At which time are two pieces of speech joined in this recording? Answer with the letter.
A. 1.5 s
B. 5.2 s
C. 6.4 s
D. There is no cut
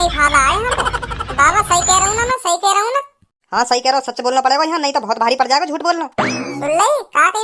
B